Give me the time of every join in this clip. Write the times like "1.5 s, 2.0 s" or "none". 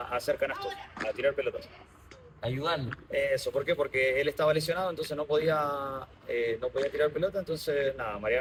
none